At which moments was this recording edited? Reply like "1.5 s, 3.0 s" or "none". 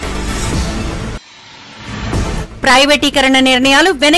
1.0 s